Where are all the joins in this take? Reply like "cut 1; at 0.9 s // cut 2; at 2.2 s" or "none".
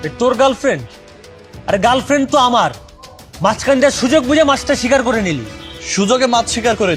none